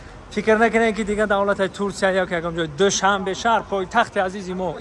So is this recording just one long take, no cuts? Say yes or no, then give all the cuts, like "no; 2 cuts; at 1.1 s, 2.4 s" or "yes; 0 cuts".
yes; 0 cuts